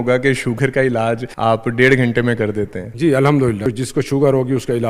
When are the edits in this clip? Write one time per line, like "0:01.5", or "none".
0:01.3
0:02.8
0:03.7